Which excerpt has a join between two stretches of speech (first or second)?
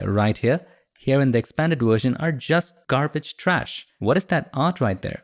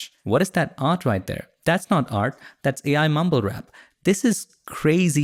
first